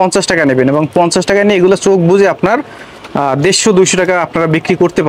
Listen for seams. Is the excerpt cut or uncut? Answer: uncut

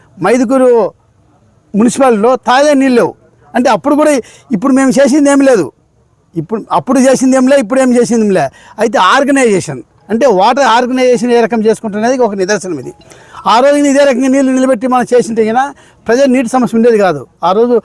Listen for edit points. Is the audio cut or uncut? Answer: uncut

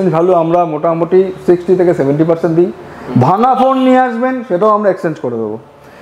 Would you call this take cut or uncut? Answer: uncut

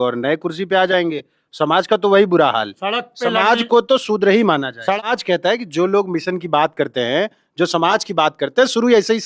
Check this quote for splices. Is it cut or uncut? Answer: cut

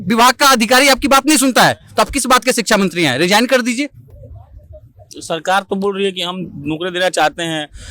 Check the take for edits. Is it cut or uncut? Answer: uncut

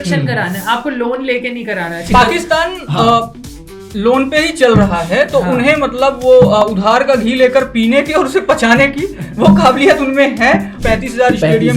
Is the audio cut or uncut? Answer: cut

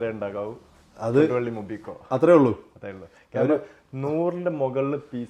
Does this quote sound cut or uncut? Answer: uncut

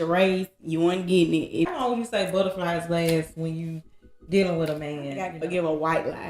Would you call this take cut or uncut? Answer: cut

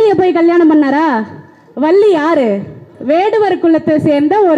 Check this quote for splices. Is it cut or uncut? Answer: cut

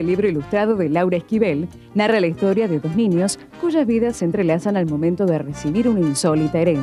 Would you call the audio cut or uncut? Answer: uncut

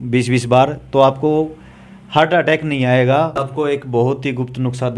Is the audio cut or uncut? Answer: cut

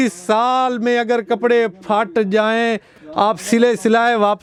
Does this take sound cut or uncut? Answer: uncut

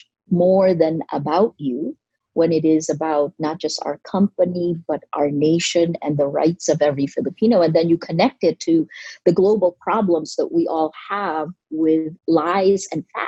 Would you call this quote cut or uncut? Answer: uncut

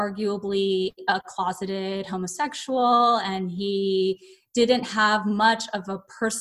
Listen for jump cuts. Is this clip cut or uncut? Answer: uncut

